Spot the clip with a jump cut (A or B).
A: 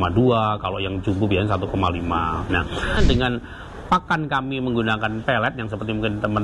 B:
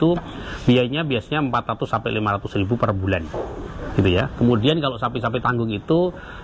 A